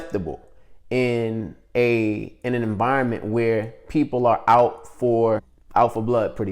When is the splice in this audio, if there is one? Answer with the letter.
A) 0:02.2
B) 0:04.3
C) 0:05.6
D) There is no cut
C